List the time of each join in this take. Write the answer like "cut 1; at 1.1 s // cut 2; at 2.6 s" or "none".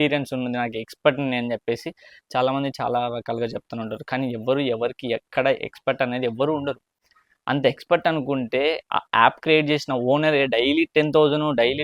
none